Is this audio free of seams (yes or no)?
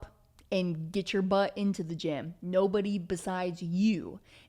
yes